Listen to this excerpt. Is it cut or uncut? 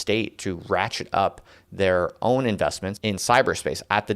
cut